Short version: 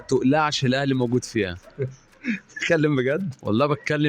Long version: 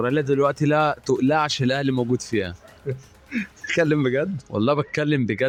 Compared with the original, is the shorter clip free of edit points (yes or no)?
no